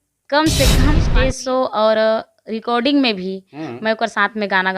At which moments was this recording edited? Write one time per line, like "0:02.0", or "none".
0:01.1